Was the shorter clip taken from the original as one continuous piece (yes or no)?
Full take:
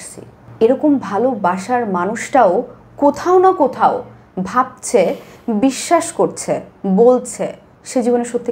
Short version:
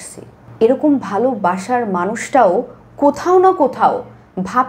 yes